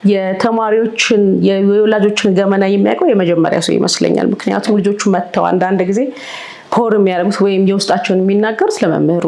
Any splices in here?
no; 0 cuts

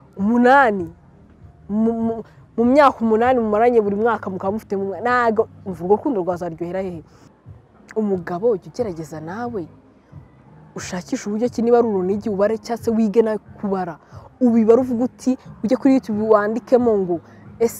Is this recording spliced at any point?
yes; 1 cut; at 7.3 s

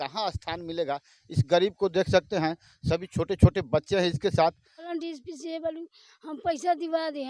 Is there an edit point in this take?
yes; 2 cuts; at 1.1 s, 4.9 s

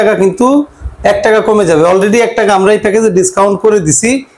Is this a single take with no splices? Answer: yes; 0 cuts

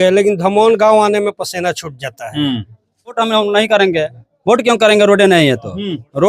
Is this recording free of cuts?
no; 1 cut; at 3.2 s

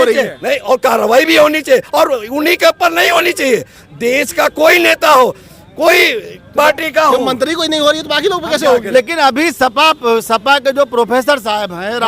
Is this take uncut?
no; 1 cut; at 8.9 s

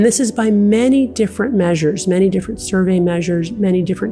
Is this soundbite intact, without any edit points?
yes; 0 cuts

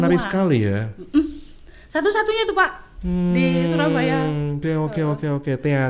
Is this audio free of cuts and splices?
yes; 0 cuts

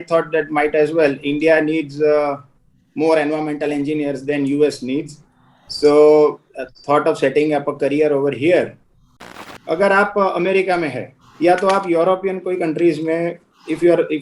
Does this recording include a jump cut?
yes; 1 cut; at 9.4 s

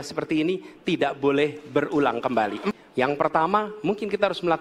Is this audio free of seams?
no; 1 cut; at 2.7 s

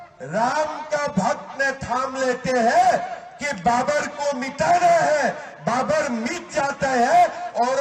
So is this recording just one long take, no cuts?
yes; 0 cuts

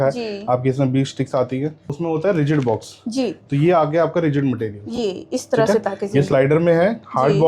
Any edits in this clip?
yes; 1 cut; at 1.9 s

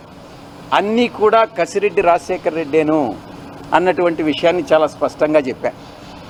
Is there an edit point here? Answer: no; 0 cuts

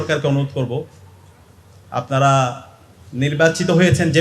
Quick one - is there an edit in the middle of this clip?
no; 0 cuts

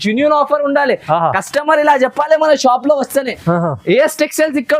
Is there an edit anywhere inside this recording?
no; 0 cuts

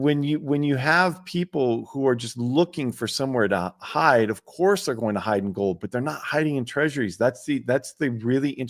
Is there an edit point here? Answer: no; 0 cuts

